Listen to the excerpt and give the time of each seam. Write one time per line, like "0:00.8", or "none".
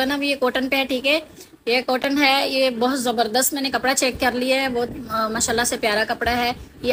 none